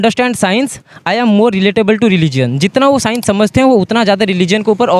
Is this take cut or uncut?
uncut